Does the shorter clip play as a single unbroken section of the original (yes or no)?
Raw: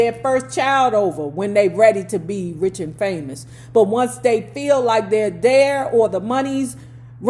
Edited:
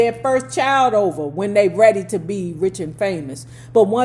yes